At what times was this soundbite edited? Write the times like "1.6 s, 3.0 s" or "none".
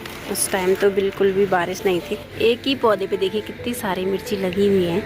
2.2 s